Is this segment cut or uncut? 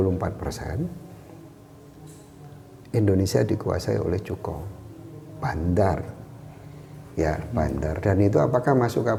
uncut